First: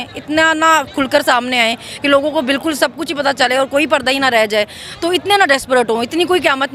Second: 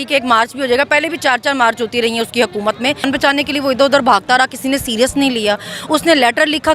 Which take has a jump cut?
second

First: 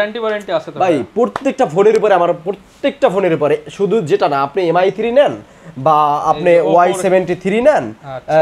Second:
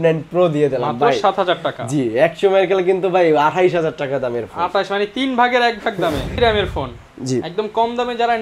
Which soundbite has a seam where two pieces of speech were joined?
second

